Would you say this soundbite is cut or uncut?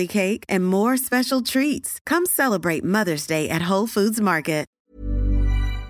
cut